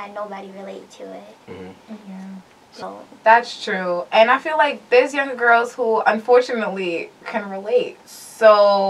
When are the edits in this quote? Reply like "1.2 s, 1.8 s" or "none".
2.6 s